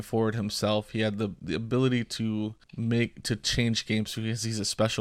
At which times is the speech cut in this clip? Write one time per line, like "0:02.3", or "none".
0:02.6